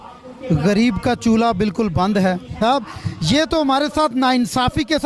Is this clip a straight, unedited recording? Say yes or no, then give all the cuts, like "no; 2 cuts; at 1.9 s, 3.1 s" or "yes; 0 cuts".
no; 1 cut; at 2.6 s